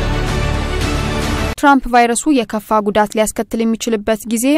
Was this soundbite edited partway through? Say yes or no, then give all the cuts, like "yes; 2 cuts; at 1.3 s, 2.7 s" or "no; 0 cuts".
yes; 1 cut; at 1.5 s